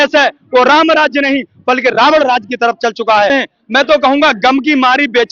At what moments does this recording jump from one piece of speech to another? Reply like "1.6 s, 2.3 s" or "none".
3.3 s